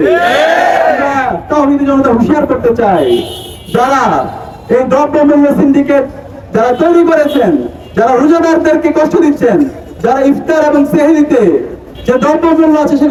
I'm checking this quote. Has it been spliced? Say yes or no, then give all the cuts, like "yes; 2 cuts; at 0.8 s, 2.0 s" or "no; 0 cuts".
no; 0 cuts